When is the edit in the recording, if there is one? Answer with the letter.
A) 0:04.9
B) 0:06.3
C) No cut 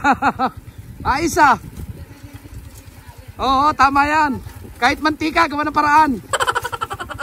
B